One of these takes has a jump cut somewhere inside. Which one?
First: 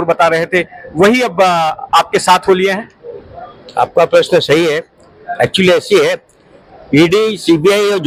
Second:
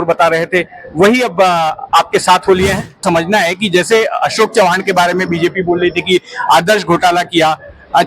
second; 1 cut; at 3.0 s

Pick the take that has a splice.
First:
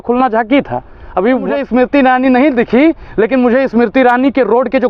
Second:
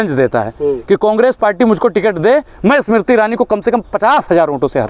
first; 1 cut; at 1.6 s

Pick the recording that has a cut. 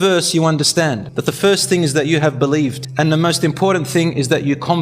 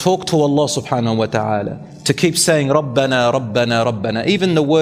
first; 2 cuts; at 1.1 s, 2.8 s

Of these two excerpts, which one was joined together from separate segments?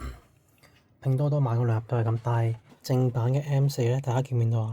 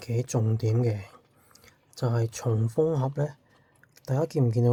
first; 1 cut; at 2.7 s

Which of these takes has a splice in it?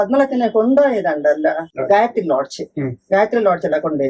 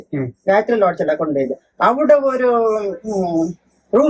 first; 1 cut; at 1.7 s

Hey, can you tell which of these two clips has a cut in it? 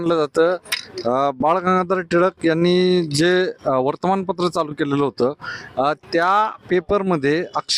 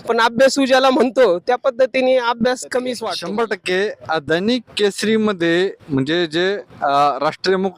second; 1 cut; at 3.1 s

